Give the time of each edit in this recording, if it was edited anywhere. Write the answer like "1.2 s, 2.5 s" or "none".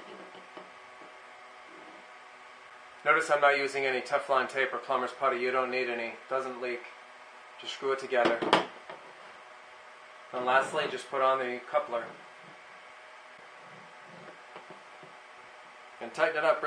none